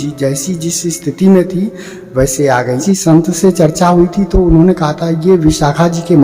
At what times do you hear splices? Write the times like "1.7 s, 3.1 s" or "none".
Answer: 2.8 s